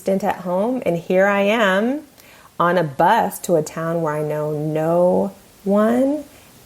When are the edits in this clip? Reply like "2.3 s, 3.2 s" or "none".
3.4 s